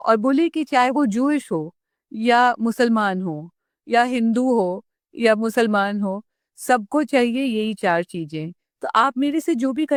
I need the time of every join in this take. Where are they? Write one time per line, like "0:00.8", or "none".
none